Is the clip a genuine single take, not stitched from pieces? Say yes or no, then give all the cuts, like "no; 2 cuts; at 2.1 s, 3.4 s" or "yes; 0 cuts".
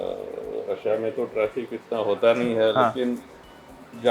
yes; 0 cuts